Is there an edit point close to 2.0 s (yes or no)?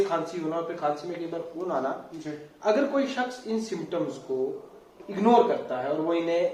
no